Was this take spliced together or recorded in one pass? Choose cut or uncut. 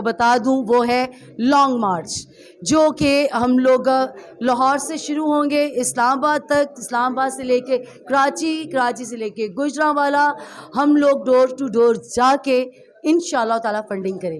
uncut